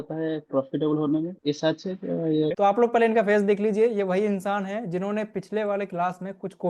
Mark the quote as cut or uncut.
cut